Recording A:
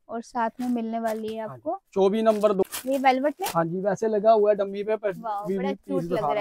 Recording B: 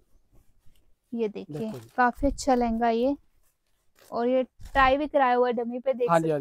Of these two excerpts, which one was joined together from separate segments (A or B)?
A